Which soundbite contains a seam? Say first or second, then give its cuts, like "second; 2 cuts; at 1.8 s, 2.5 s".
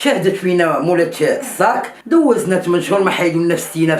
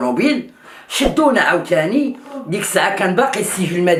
first; 1 cut; at 1.9 s